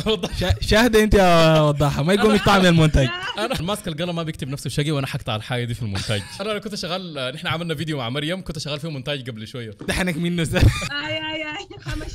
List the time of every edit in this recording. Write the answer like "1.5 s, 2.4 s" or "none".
3.6 s, 6.4 s, 9.9 s, 10.9 s